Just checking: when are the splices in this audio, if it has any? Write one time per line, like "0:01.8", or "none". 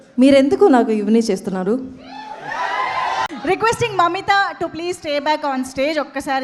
0:03.3